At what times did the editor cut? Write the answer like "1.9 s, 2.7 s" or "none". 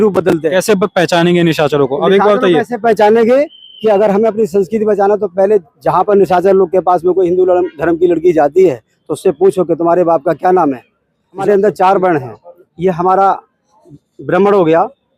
11.4 s